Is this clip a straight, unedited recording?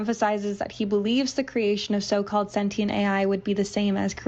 yes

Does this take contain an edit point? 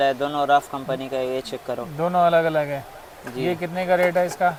no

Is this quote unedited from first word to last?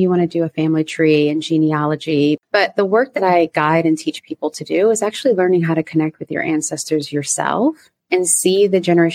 no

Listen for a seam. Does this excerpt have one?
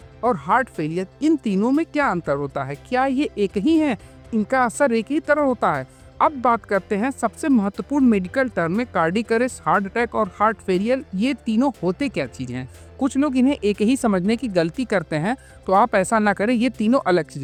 no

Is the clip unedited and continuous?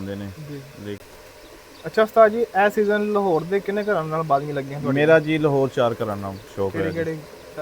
no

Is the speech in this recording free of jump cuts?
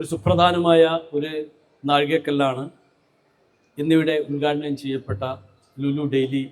yes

